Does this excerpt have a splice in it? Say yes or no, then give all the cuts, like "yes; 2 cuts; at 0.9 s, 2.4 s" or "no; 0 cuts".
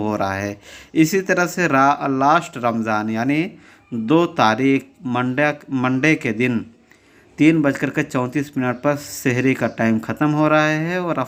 no; 0 cuts